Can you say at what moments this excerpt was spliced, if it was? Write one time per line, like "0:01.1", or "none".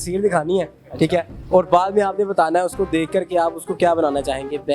none